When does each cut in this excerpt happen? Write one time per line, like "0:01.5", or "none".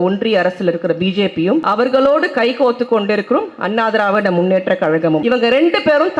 0:01.6
0:05.2